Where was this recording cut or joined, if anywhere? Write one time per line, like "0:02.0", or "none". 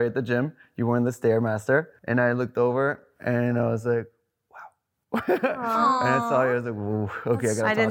0:01.9